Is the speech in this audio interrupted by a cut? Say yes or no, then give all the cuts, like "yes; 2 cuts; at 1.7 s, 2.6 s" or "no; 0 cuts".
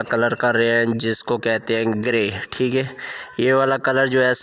no; 0 cuts